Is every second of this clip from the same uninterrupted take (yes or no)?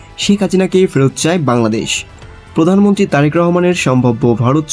yes